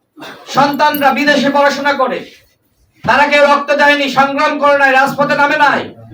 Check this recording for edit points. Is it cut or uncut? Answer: uncut